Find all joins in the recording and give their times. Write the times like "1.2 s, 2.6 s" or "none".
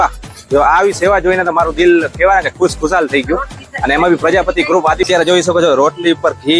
5.1 s